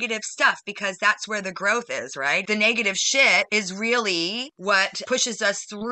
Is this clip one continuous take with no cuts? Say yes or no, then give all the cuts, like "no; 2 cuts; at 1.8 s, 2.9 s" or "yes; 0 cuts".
no; 3 cuts; at 2.4 s, 3.5 s, 4.8 s